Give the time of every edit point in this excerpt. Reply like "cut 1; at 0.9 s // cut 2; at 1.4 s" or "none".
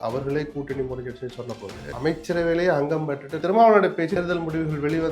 cut 1; at 1.8 s // cut 2; at 3.4 s // cut 3; at 4.2 s